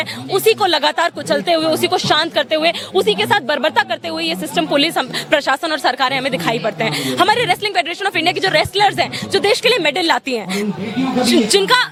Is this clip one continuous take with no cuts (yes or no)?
yes